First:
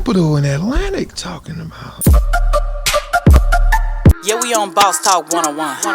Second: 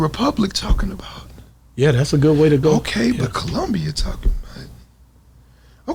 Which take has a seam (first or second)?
first